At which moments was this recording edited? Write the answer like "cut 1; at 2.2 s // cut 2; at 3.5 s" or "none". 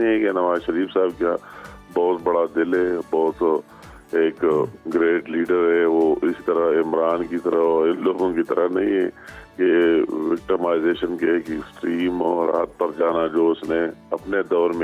none